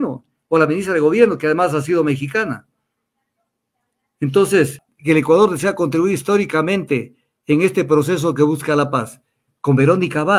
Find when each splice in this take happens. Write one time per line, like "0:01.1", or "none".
0:04.9